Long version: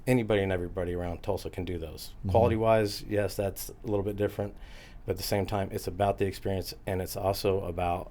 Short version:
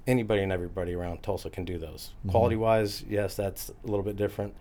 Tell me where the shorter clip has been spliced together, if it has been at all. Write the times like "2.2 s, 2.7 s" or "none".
none